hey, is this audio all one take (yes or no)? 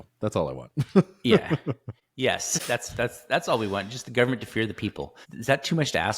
no